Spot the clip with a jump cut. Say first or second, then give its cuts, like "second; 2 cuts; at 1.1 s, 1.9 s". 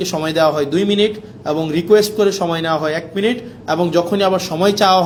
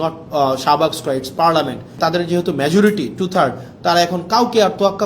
second; 1 cut; at 2.0 s